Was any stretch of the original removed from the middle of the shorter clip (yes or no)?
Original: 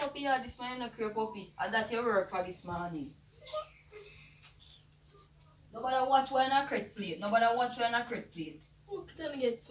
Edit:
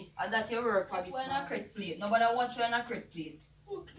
yes